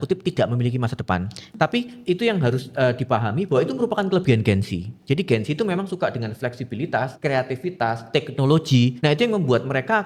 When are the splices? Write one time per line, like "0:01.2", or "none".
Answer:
0:01.4
0:07.1
0:09.0